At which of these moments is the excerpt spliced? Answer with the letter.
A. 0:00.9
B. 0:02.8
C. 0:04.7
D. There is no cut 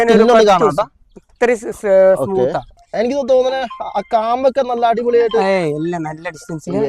B